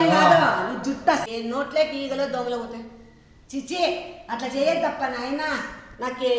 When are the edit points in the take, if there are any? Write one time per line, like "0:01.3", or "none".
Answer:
0:01.2